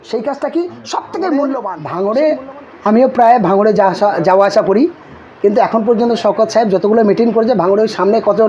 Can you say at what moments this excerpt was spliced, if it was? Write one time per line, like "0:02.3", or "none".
0:01.8